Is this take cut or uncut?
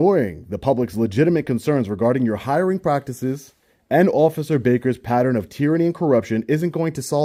uncut